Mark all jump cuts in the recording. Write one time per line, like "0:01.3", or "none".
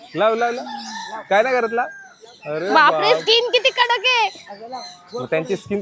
none

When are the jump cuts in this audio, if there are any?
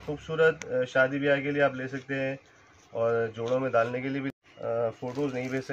0:04.4

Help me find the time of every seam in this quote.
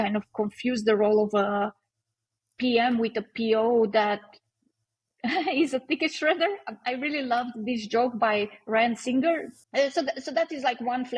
0:09.6

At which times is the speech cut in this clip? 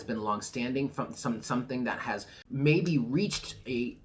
0:02.4

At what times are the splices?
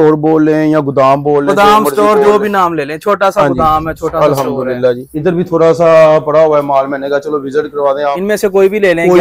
0:05.1
0:08.1

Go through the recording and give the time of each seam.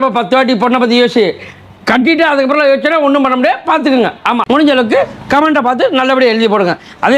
0:04.4

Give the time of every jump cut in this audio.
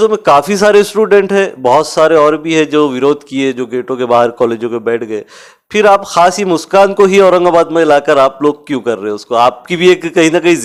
none

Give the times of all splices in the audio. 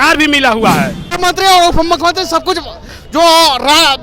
0:01.0

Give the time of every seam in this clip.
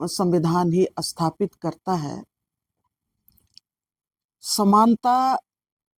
none

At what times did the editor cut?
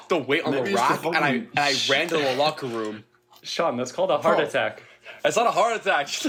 none

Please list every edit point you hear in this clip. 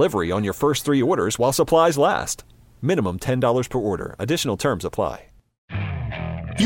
0:05.5

